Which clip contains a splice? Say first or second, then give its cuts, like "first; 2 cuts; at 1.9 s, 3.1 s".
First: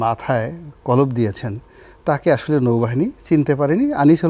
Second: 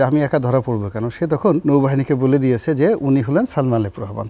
second; 1 cut; at 1.6 s